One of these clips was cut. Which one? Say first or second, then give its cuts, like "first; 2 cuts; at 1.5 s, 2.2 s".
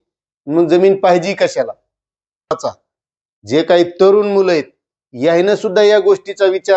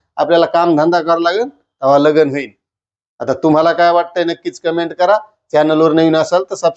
first; 1 cut; at 2.6 s